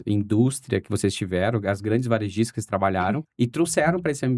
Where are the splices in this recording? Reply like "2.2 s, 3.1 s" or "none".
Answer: 3.3 s